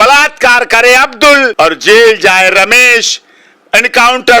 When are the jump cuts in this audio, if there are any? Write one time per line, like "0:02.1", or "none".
0:01.5